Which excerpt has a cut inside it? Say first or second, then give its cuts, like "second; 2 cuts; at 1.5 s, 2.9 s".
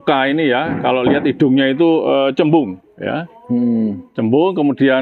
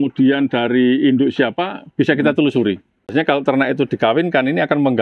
second; 1 cut; at 3.1 s